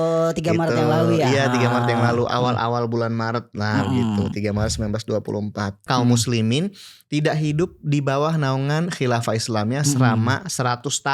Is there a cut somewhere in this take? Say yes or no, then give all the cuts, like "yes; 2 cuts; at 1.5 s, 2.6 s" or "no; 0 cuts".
yes; 1 cut; at 5.8 s